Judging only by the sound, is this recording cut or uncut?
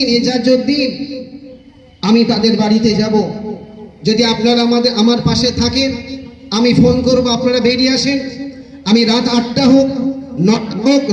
uncut